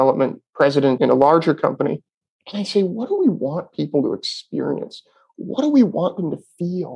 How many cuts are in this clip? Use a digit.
1